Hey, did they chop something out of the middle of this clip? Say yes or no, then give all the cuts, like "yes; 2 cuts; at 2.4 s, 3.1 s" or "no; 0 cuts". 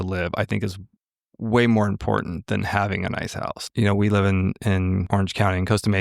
yes; 2 cuts; at 3.6 s, 5.0 s